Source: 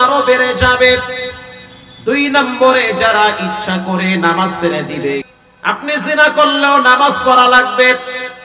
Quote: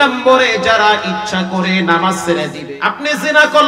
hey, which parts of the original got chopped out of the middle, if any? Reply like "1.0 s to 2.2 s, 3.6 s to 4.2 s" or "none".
4.9 s to 5.4 s